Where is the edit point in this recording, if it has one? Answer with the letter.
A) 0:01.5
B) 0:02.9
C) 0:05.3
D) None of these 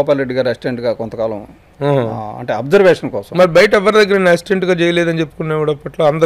D